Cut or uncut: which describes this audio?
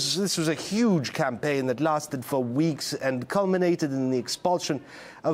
uncut